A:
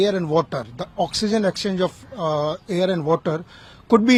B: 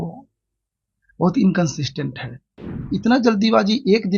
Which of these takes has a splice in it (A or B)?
B